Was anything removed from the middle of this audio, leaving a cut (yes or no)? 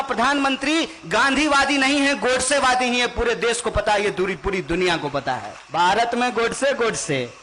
yes